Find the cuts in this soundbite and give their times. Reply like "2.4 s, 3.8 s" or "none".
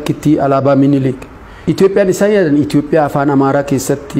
none